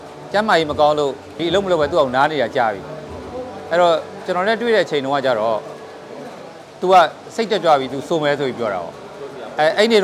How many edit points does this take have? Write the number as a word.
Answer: one